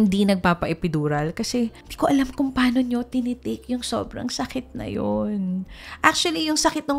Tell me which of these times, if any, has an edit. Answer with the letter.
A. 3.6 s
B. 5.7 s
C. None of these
C